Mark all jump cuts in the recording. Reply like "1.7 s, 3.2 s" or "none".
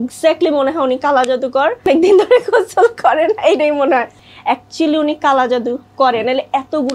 1.9 s, 4.2 s

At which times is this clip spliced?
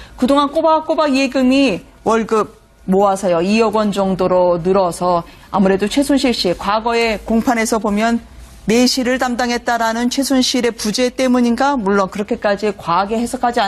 6.6 s

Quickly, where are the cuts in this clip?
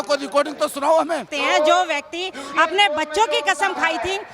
1.3 s

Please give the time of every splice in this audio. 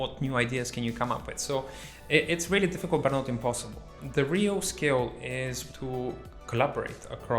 4.0 s, 5.6 s

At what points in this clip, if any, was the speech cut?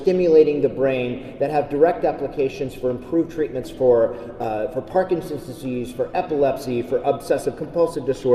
none

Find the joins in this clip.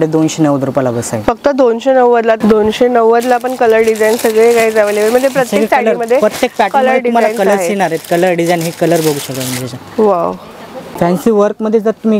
2.4 s, 10.9 s

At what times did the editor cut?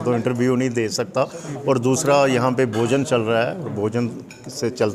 none

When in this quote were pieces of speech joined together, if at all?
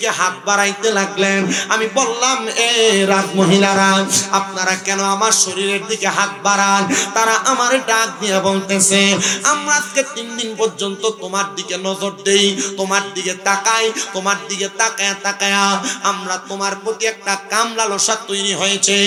none

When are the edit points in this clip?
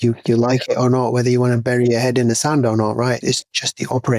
3.2 s

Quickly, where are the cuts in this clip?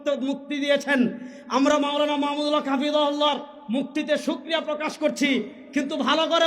none

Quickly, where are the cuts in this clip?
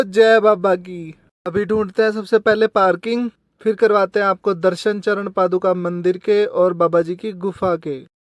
none

